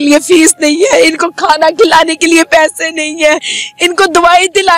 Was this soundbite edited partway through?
no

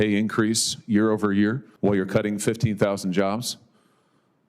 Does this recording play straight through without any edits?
no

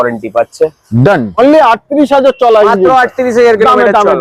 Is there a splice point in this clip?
yes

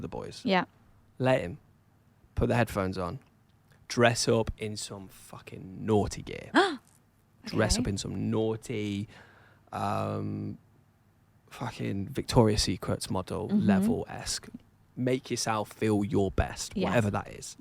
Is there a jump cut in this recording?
no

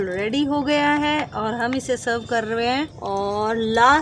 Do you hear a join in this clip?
yes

